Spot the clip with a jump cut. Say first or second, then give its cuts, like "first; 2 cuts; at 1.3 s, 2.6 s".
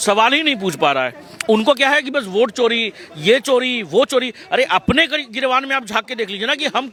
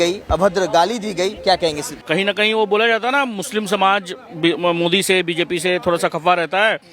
second; 1 cut; at 1.9 s